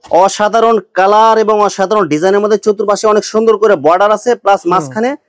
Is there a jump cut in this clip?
no; 0 cuts

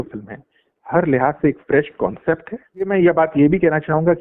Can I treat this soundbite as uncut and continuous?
no; 1 cut; at 2.9 s

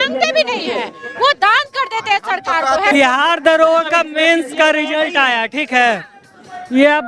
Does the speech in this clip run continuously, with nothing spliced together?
no; 1 cut; at 2.9 s

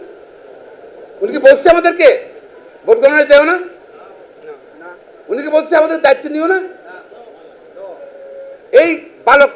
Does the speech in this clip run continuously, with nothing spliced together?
yes; 0 cuts

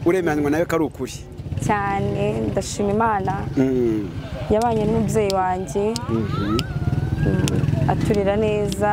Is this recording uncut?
yes; 0 cuts

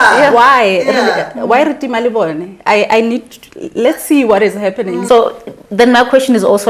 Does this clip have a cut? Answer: yes; 1 cut; at 5.0 s

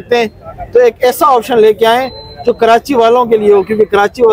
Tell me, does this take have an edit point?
no; 0 cuts

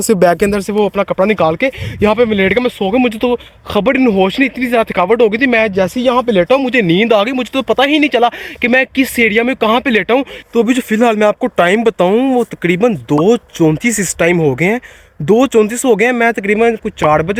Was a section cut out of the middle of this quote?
no; 0 cuts

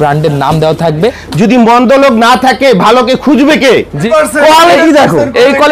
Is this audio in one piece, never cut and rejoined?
no; 2 cuts; at 1.2 s, 4.0 s

